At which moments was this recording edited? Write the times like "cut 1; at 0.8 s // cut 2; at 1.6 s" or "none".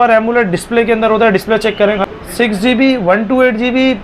cut 1; at 2.0 s